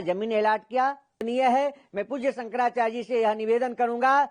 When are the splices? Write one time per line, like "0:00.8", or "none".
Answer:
0:01.2